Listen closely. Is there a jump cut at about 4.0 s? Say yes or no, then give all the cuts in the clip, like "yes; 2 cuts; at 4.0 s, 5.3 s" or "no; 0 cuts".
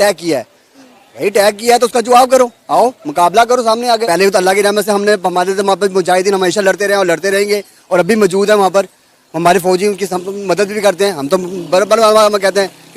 yes; 1 cut; at 4.0 s